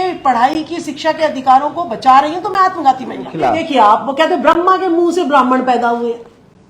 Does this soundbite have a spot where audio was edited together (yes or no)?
yes